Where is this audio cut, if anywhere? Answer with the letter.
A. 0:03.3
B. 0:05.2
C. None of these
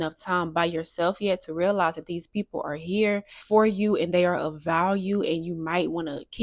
A